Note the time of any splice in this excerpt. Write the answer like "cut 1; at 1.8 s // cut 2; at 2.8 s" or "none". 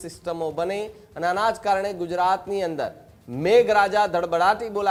none